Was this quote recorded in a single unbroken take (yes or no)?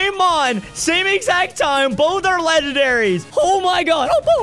no